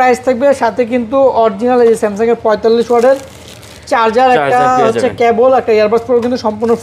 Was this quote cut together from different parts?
no; 0 cuts

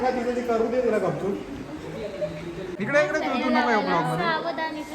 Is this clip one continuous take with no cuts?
no; 1 cut; at 2.7 s

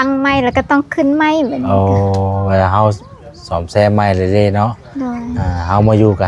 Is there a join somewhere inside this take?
no; 0 cuts

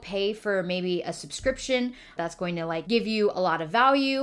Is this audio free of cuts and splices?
no; 1 cut; at 2.2 s

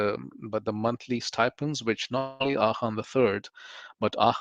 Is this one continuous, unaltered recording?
yes; 0 cuts

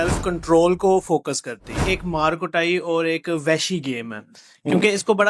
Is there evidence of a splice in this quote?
yes; 1 cut; at 1.8 s

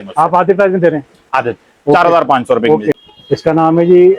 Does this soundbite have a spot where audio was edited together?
yes; 1 cut; at 2.9 s

